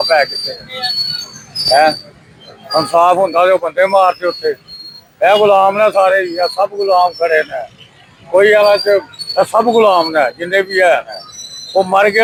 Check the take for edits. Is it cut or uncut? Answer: uncut